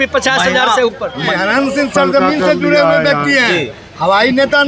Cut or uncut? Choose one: cut